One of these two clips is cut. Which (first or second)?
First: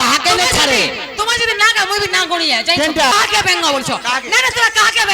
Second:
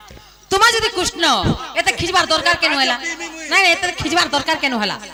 first